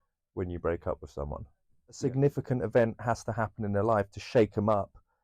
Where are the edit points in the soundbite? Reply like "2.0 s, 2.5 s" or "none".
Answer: 2.0 s